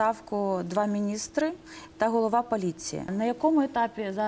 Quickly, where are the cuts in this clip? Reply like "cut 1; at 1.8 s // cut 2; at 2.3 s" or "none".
cut 1; at 3.1 s